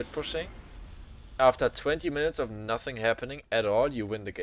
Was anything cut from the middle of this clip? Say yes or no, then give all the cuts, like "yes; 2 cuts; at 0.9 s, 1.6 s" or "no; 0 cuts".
no; 0 cuts